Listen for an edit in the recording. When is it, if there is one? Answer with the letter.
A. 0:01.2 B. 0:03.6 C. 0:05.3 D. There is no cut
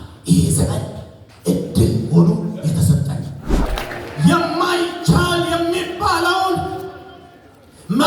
B